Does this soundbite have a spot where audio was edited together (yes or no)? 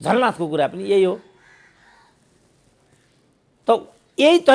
no